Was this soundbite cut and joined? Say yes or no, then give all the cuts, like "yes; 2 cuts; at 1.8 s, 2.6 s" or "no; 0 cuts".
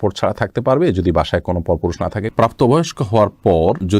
yes; 1 cut; at 2.3 s